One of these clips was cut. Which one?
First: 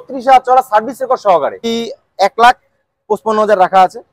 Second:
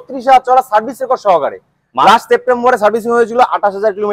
first; 1 cut; at 1.7 s

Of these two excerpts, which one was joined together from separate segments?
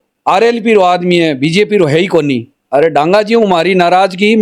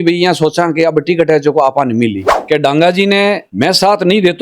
second; 2 cuts; at 2.3 s, 3.5 s

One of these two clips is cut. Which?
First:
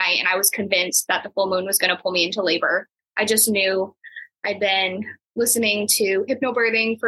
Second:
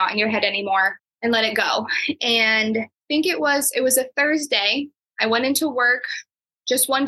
second; 2 cuts; at 1.0 s, 3.0 s

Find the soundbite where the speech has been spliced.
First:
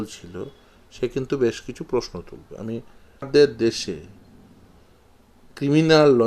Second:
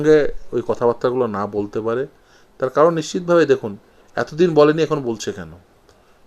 first; 1 cut; at 3.3 s

